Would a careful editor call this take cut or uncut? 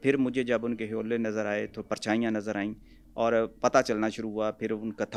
uncut